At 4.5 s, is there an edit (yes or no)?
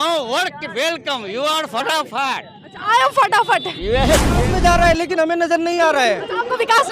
yes